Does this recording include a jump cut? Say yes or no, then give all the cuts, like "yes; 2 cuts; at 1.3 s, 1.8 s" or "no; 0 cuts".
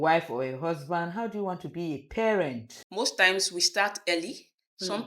yes; 1 cut; at 2.7 s